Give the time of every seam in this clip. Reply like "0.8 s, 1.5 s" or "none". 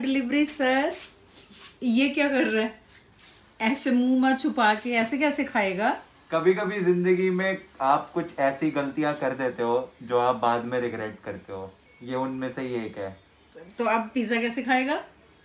none